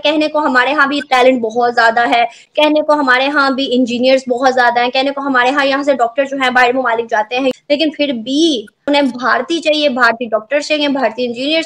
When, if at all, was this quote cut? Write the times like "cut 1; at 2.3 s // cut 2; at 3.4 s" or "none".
none

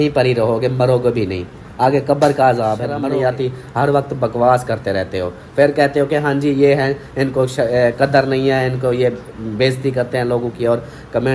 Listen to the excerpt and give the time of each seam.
cut 1; at 2.9 s

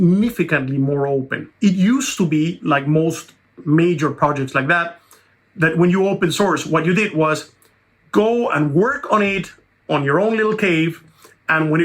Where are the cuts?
cut 1; at 1.4 s

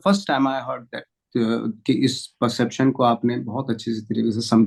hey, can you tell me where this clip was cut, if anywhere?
none

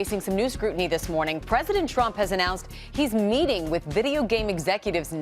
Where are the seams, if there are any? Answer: cut 1; at 1.4 s

